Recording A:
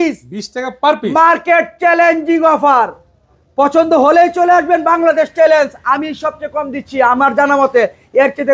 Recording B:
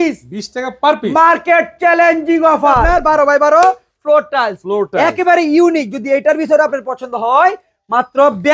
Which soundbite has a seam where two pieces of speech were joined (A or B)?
B